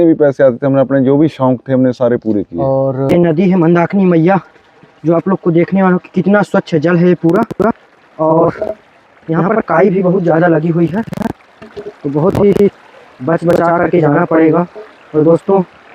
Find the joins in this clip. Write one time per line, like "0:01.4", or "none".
0:03.1